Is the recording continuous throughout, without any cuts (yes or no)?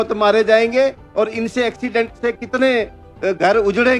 yes